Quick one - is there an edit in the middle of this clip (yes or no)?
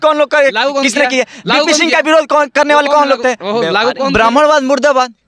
yes